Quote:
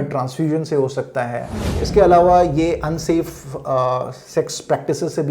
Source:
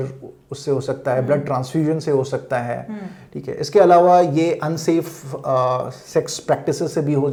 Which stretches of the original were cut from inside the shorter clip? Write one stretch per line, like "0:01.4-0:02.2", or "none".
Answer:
0:03.1-0:03.6